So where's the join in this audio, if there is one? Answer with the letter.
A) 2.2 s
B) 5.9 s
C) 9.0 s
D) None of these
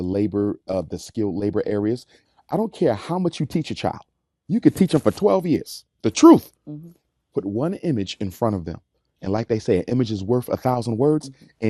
A